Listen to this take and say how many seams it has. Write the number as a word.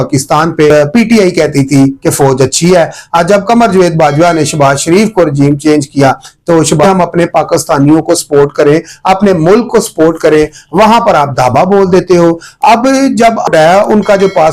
three